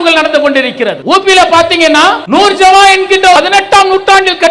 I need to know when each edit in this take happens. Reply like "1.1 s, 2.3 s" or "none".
1.0 s, 2.2 s, 3.4 s